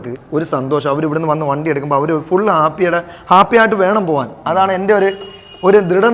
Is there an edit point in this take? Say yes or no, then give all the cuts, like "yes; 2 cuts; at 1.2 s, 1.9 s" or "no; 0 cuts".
no; 0 cuts